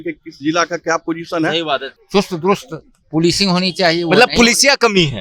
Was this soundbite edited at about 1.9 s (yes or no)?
yes